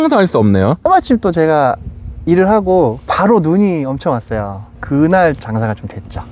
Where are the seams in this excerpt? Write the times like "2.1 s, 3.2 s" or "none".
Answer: 0.8 s, 5.4 s